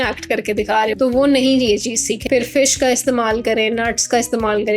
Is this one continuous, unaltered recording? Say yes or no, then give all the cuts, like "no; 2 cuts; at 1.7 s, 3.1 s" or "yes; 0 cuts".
no; 2 cuts; at 0.9 s, 2.1 s